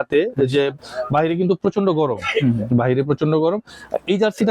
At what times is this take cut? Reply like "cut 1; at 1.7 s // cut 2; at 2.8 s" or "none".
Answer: none